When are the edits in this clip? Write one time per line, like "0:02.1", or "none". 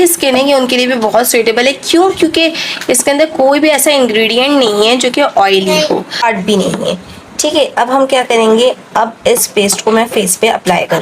0:06.1